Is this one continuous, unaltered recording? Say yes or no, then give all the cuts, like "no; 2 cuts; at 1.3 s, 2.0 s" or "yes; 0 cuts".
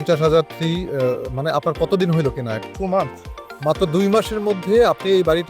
no; 1 cut; at 2.5 s